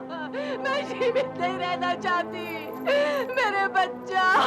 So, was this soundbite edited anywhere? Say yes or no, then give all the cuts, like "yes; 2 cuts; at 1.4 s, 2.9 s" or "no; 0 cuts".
no; 0 cuts